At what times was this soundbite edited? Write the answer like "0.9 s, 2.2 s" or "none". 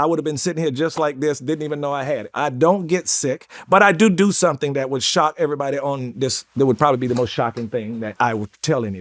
8.1 s